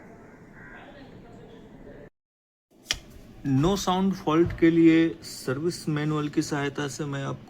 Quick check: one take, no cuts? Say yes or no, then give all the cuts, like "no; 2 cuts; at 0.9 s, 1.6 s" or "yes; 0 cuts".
no; 1 cut; at 2.1 s